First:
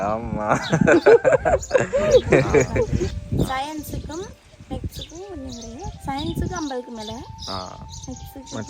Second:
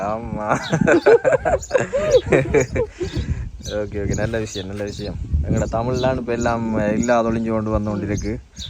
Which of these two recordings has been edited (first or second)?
first